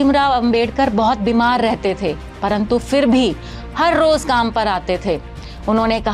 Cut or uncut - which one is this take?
uncut